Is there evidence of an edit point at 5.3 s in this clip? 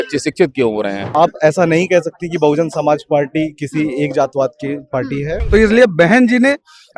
yes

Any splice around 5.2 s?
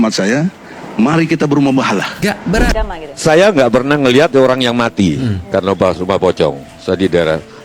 no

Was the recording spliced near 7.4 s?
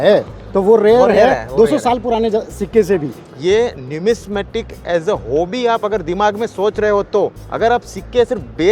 yes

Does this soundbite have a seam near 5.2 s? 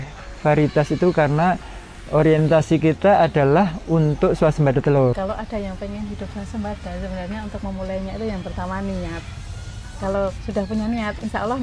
yes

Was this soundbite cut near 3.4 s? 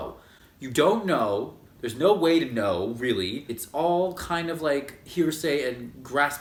no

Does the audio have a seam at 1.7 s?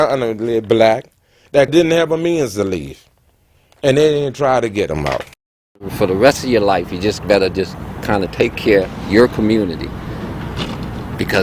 yes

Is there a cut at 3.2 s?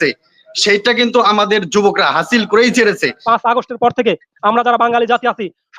yes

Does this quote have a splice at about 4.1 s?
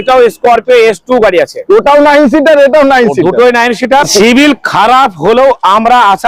yes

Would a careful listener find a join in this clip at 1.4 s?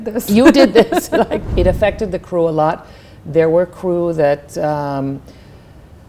yes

